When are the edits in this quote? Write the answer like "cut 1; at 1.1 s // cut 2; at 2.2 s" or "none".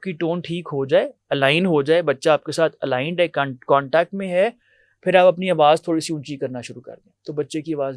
none